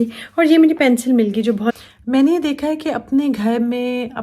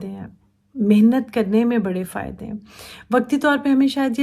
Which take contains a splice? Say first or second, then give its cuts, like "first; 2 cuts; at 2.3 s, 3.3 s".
first; 1 cut; at 1.7 s